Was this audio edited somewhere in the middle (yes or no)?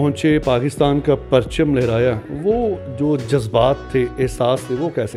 no